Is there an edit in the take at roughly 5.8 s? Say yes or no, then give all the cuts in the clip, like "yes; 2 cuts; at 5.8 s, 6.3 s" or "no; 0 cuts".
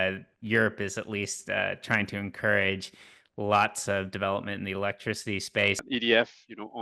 yes; 1 cut; at 5.8 s